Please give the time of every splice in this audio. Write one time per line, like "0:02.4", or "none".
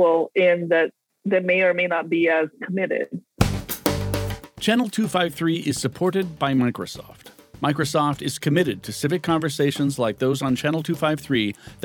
0:01.1
0:03.3